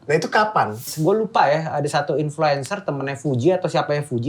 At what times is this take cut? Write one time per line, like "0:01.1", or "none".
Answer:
0:00.9